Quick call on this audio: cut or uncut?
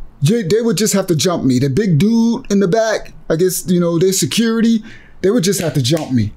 uncut